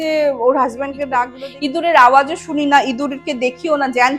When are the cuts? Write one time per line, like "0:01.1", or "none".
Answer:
0:01.4